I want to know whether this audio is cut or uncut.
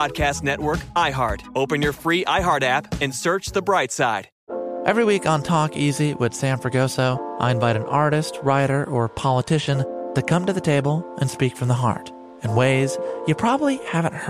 cut